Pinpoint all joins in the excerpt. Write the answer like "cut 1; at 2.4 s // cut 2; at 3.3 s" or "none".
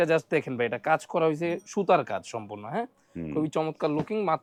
none